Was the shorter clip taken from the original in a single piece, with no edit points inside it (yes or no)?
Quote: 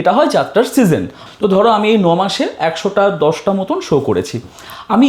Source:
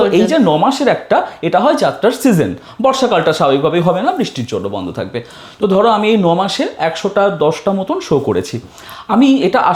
no